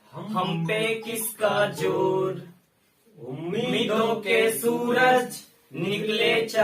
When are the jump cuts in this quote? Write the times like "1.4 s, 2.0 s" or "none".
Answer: none